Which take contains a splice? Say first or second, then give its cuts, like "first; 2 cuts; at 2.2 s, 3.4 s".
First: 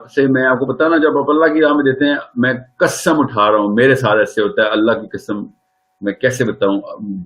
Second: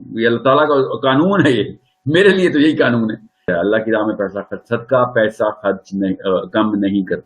second; 1 cut; at 3.5 s